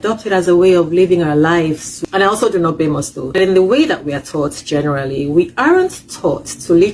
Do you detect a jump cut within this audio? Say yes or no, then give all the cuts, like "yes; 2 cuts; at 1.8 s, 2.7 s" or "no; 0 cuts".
yes; 2 cuts; at 1.9 s, 3.4 s